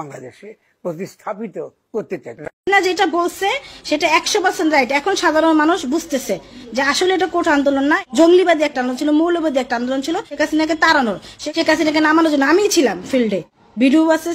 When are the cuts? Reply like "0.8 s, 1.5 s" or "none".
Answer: 2.6 s